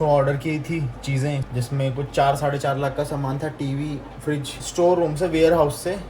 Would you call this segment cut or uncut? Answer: cut